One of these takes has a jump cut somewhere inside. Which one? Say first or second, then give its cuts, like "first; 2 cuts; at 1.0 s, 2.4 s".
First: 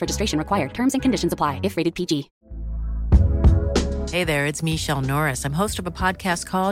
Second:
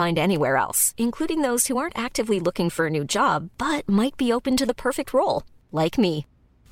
first; 1 cut; at 2.3 s